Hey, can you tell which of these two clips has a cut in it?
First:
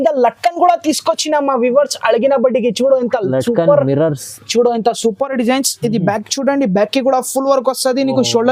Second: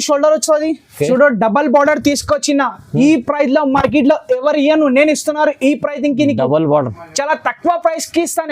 second; 1 cut; at 1.1 s

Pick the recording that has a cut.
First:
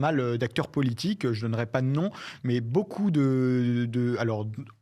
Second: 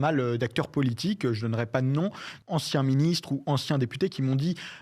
second; 1 cut; at 2.3 s

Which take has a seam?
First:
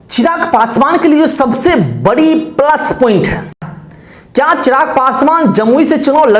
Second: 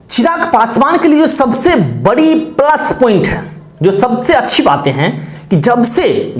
first; 1 cut; at 3.7 s

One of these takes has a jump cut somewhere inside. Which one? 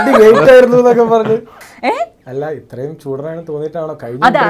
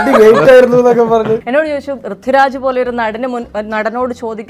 second; 1 cut; at 1.4 s

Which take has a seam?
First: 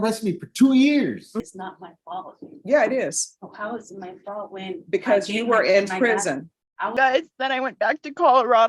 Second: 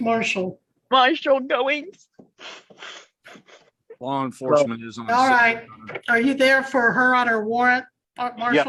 first; 2 cuts; at 1.3 s, 6.9 s

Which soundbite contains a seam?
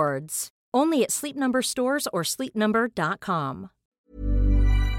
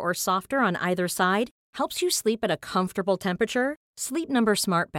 first; 1 cut; at 4.0 s

